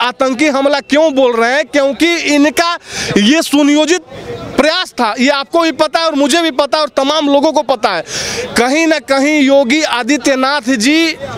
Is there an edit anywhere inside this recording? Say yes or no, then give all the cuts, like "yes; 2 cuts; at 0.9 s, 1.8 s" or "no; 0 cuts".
no; 0 cuts